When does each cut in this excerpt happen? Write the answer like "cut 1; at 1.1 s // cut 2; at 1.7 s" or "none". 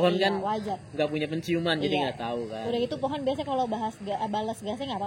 none

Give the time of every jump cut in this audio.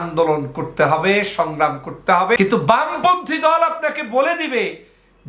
cut 1; at 2.4 s

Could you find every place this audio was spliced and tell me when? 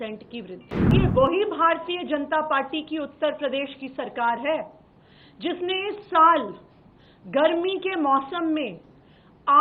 cut 1; at 0.9 s

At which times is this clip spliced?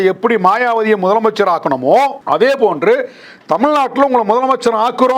cut 1; at 2.2 s

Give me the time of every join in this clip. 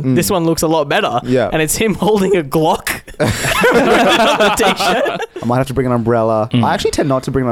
cut 1; at 5.3 s

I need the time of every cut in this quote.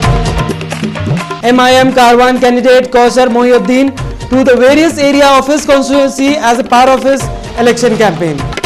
none

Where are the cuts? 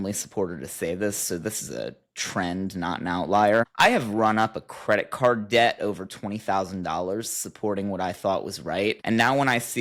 none

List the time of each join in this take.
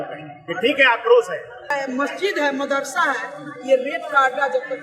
cut 1; at 1.7 s

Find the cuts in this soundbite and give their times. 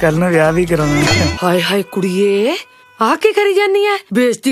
cut 1; at 1.3 s

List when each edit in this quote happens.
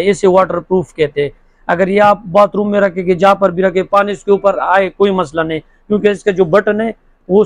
none

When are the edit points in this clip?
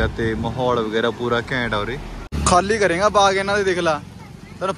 cut 1; at 2.3 s

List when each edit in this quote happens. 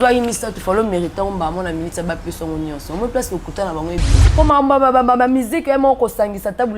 cut 1; at 4.3 s

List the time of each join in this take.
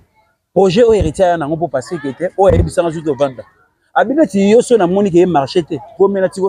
none

